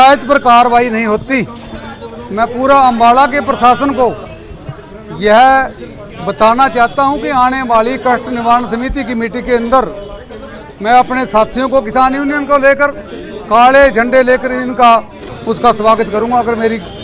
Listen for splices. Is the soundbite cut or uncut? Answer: cut